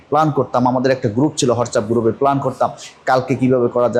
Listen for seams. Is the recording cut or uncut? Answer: uncut